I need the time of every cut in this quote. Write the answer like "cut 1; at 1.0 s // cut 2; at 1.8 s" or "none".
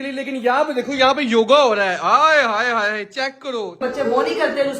cut 1; at 3.8 s